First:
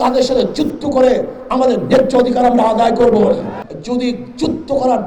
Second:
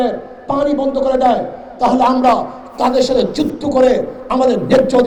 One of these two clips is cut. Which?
first; 1 cut; at 3.6 s

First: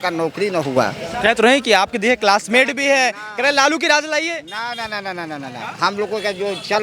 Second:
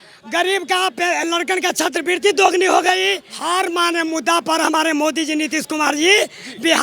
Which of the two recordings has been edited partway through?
second; 1 cut; at 3.3 s

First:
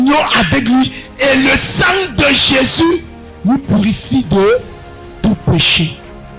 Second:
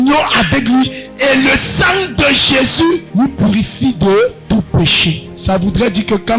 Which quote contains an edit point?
second; 3 cuts; at 3.1 s, 4.4 s, 5.3 s

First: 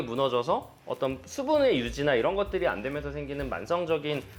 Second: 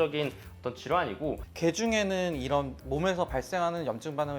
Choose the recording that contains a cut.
second; 1 cut; at 1.5 s

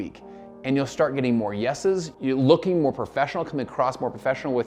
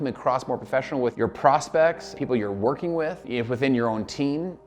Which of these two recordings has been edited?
second; 2 cuts; at 2.1 s, 3.3 s

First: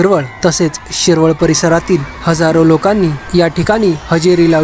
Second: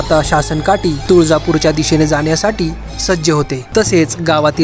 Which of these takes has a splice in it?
second; 1 cut; at 3.7 s

